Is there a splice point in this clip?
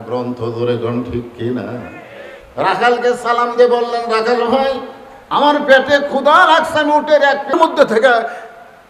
yes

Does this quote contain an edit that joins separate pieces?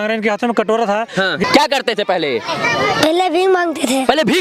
yes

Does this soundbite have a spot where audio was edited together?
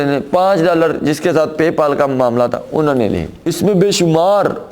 yes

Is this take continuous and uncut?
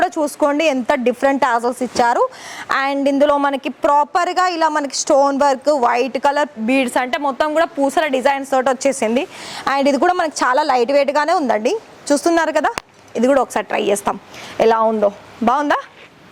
yes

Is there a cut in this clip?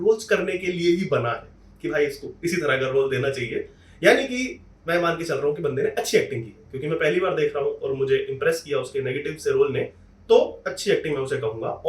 no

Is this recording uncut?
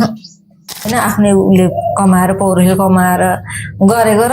no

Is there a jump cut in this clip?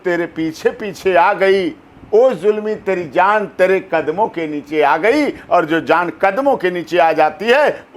no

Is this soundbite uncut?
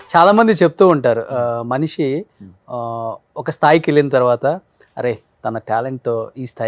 yes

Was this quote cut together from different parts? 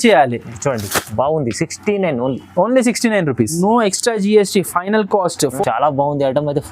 yes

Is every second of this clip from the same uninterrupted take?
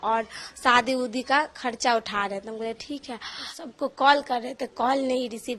no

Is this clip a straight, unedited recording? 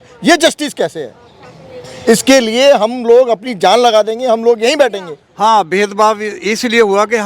no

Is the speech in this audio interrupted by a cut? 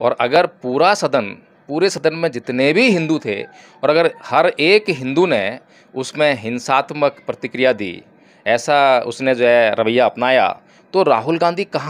no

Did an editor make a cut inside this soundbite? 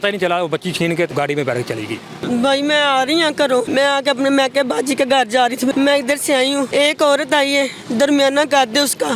yes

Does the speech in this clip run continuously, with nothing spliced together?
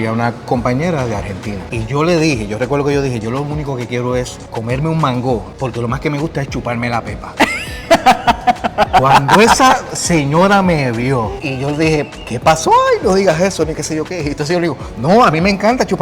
no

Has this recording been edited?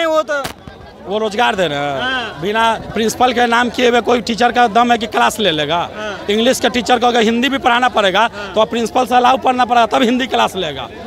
no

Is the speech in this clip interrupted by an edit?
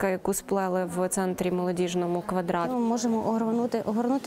yes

